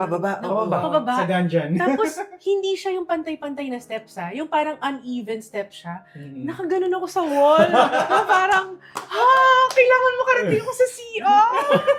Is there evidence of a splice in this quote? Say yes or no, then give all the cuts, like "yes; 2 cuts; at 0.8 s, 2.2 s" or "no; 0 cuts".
no; 0 cuts